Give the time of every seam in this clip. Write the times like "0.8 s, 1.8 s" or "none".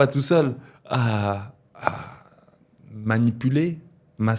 none